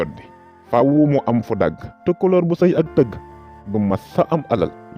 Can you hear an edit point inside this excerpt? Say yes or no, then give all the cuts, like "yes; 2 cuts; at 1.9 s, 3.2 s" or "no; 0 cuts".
yes; 1 cut; at 1.9 s